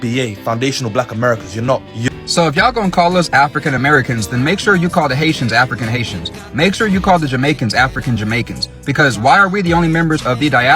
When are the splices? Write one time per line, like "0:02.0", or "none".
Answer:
0:02.1

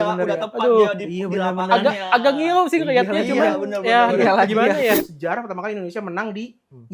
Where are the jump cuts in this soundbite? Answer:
0:05.0

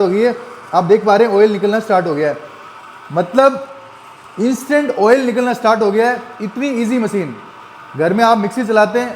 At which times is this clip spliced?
none

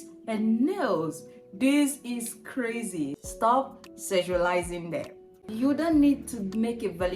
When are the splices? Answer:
0:03.2
0:05.4

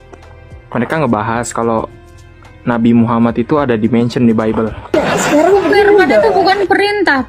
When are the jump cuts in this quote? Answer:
0:04.9

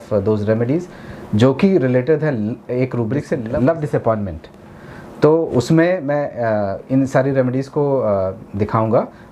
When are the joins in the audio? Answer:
0:03.4

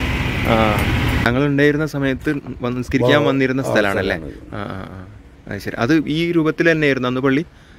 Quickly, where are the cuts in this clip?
0:01.3

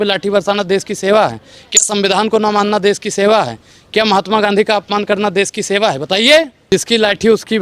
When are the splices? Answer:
0:06.6

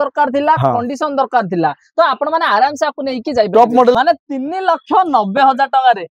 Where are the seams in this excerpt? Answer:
0:03.9

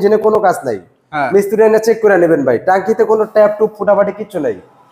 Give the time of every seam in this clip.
none

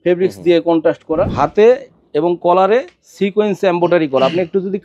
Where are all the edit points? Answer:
0:01.3

